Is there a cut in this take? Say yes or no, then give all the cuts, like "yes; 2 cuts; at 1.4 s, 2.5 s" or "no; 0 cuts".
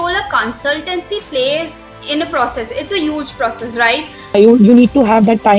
yes; 1 cut; at 4.4 s